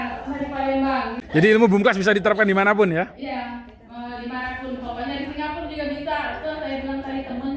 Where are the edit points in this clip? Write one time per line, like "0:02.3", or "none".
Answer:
0:01.2